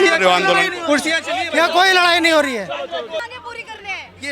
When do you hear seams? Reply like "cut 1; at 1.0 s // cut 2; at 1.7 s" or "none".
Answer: cut 1; at 3.2 s